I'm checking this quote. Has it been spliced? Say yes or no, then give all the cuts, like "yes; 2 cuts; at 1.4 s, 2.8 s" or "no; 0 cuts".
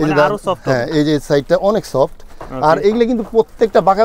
no; 0 cuts